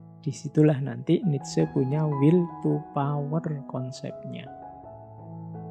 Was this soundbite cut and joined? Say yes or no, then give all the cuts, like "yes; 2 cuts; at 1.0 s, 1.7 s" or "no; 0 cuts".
no; 0 cuts